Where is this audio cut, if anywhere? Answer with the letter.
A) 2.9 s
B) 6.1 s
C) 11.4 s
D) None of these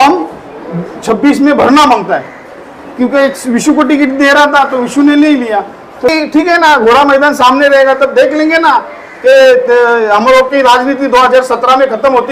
B